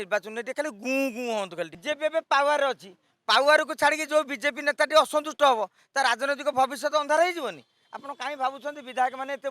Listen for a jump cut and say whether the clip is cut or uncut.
cut